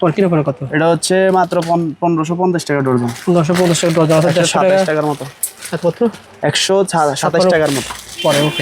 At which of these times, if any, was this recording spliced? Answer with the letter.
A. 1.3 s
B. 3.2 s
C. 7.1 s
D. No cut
D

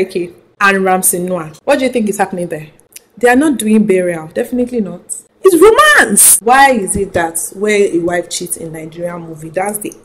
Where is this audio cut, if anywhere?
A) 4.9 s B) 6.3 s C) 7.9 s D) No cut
B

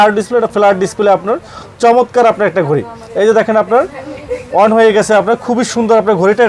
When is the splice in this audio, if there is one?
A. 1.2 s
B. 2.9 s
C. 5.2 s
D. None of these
D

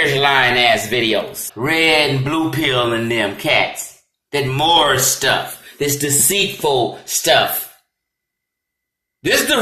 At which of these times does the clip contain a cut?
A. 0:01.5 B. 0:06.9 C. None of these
A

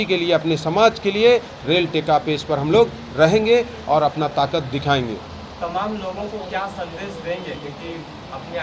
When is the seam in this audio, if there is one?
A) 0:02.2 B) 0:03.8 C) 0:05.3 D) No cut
D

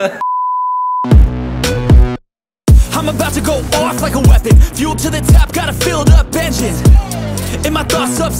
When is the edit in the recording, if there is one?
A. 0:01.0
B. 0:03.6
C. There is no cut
A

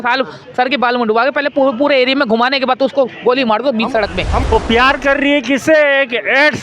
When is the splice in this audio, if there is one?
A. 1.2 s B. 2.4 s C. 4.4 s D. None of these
C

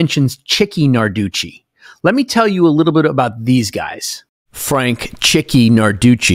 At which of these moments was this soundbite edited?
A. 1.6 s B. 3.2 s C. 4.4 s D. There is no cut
D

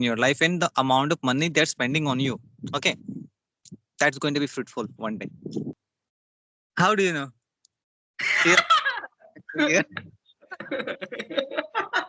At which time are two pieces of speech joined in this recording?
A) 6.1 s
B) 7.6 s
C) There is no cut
A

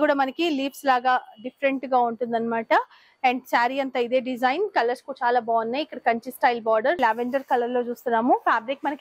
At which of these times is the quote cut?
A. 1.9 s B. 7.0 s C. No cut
B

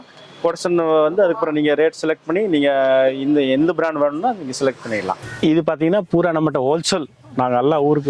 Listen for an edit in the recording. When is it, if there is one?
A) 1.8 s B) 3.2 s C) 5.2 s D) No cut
C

